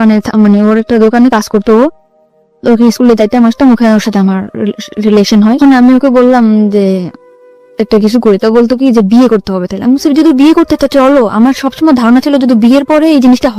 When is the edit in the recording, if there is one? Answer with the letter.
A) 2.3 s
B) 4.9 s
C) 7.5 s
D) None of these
D